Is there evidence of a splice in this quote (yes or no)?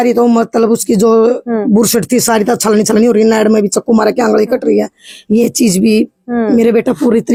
no